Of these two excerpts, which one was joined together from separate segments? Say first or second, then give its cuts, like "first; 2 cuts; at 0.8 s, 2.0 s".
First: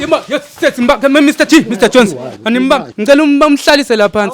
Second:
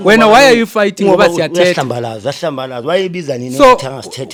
first; 1 cut; at 2.9 s